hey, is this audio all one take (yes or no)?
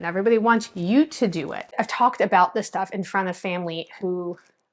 no